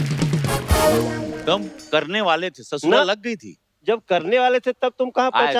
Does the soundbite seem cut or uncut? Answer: uncut